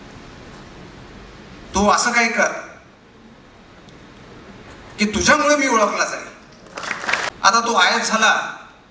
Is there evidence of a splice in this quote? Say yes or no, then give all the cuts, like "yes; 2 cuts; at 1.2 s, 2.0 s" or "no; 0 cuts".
yes; 1 cut; at 7.3 s